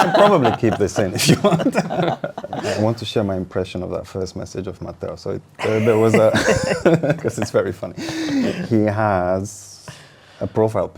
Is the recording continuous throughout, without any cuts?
no; 1 cut; at 2.6 s

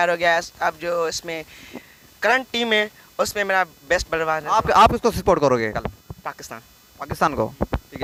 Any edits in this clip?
no; 0 cuts

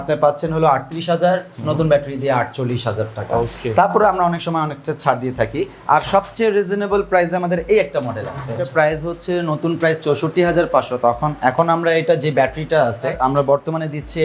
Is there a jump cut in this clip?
yes; 2 cuts; at 8.6 s, 13.1 s

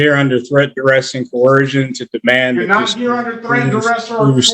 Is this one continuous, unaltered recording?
yes; 0 cuts

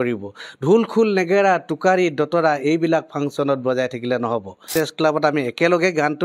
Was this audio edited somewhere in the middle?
yes; 1 cut; at 4.7 s

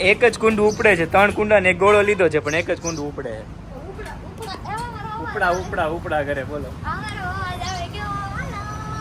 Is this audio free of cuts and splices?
yes; 0 cuts

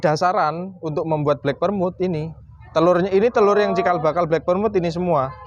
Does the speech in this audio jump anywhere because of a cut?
no; 0 cuts

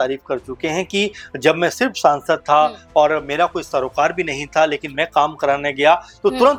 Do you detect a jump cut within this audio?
no; 0 cuts

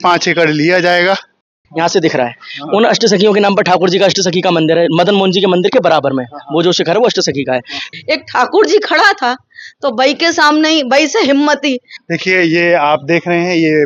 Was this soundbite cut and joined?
yes; 3 cuts; at 1.6 s, 7.8 s, 11.9 s

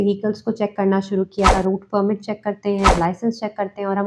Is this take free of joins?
no; 2 cuts; at 1.5 s, 2.9 s

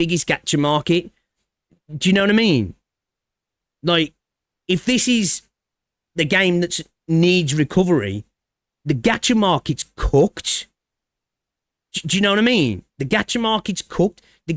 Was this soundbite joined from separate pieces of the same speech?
no; 0 cuts

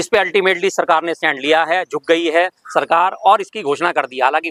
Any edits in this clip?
no; 0 cuts

